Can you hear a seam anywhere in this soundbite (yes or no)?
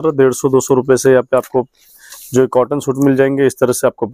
no